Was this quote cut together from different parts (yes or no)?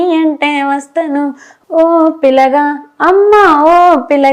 yes